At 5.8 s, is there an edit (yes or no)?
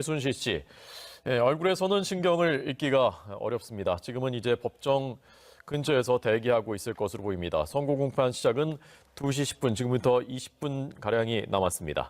yes